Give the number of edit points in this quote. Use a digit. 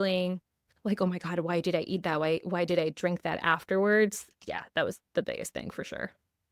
1